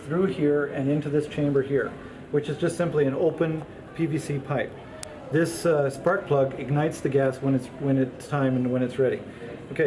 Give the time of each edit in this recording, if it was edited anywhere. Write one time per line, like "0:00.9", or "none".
0:01.1